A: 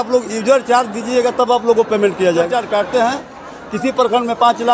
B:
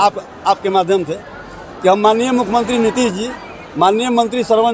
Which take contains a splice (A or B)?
A